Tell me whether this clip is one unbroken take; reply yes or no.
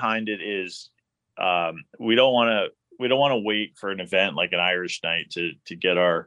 yes